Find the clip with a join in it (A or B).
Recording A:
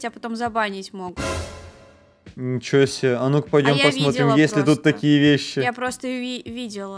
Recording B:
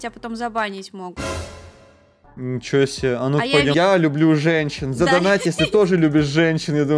B